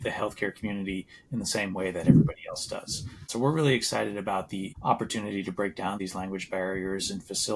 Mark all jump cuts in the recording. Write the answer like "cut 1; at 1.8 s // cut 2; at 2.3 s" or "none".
cut 1; at 3.2 s // cut 2; at 4.7 s // cut 3; at 6.0 s